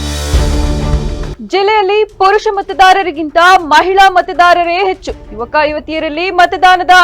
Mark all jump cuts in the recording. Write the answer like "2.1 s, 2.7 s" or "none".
1.3 s